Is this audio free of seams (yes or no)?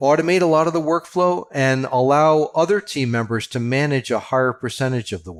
yes